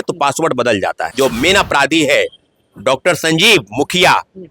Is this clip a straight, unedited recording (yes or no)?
no